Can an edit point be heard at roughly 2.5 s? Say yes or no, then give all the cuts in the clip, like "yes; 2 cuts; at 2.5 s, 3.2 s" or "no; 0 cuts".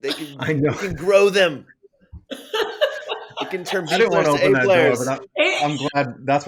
no; 0 cuts